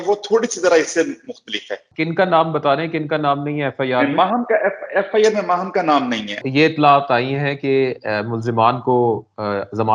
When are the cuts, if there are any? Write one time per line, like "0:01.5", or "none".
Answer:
0:01.9
0:06.4